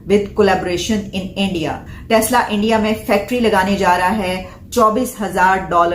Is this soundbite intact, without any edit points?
no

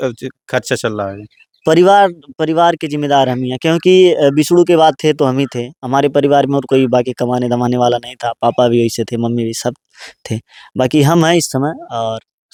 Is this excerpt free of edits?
yes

